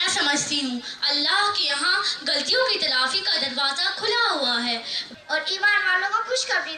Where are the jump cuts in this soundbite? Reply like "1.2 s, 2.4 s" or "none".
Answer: 5.1 s